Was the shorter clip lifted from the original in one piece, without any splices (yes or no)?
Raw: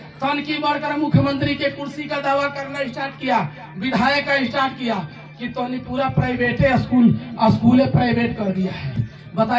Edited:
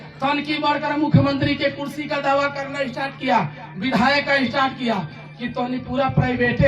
yes